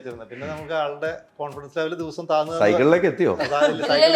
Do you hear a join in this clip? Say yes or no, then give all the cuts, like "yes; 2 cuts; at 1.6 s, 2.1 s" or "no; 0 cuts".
no; 0 cuts